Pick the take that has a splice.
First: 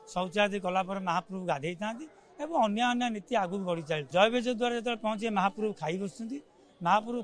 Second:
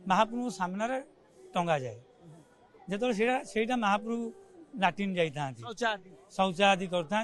first; 1 cut; at 4.0 s

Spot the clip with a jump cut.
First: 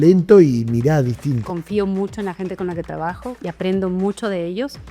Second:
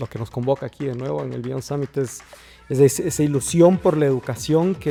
first; 1 cut; at 1.5 s

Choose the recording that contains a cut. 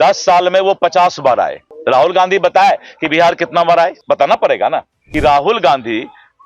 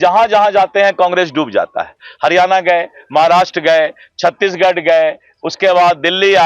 first; 3 cuts; at 1.7 s, 4.0 s, 5.0 s

